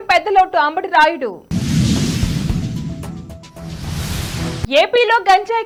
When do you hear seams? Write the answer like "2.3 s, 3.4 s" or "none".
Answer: none